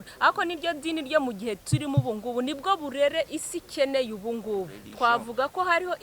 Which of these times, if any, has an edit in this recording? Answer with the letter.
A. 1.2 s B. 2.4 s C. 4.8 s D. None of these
C